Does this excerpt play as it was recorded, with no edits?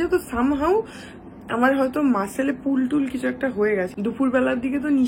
no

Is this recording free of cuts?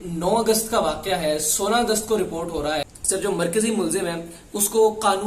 no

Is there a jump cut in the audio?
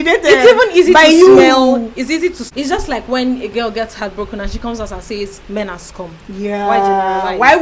yes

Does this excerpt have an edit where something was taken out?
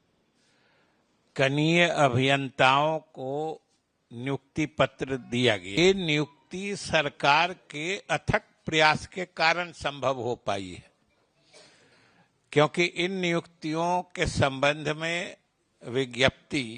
yes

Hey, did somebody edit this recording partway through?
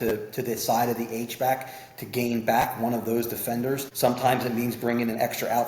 yes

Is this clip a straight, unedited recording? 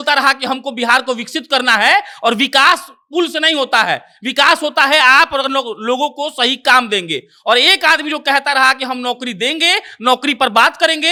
yes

